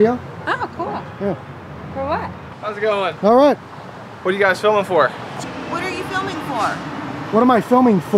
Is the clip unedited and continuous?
no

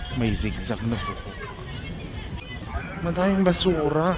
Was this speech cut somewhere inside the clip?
yes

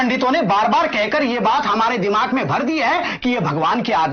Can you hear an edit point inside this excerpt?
no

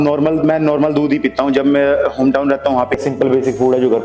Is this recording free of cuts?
no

